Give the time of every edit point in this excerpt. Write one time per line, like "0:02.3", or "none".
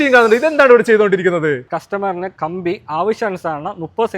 0:01.7